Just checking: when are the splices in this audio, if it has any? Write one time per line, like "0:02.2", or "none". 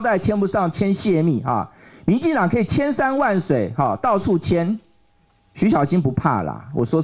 none